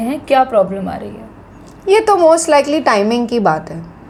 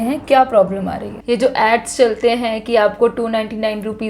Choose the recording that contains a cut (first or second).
second